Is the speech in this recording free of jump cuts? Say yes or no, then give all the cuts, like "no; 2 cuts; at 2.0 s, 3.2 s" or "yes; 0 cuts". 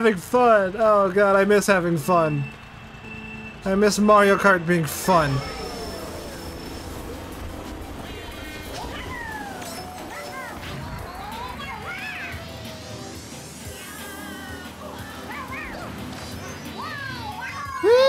yes; 0 cuts